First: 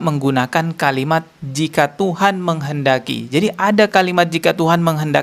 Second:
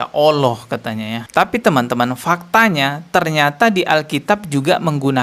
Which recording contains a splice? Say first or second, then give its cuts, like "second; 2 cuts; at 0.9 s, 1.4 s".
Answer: second; 1 cut; at 1.2 s